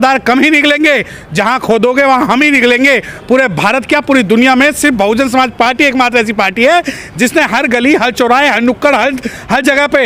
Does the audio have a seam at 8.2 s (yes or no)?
no